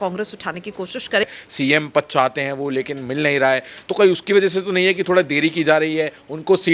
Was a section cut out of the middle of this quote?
yes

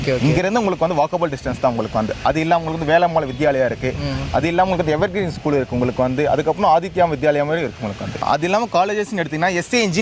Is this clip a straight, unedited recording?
yes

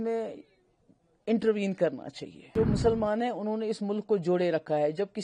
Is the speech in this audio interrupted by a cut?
yes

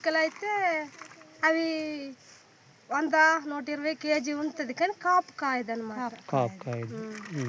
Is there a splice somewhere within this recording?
no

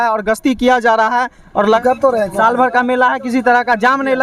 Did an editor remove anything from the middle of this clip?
yes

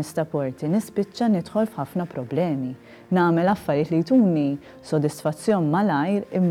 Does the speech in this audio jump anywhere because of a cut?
no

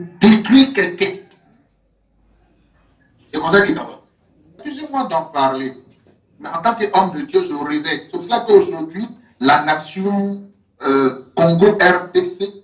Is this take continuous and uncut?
no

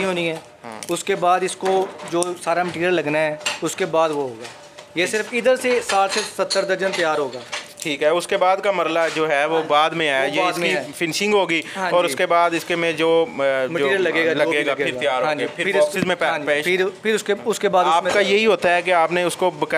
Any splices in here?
no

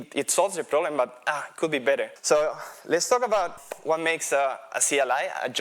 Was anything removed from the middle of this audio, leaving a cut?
yes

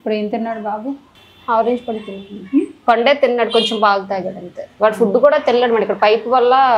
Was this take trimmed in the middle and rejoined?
no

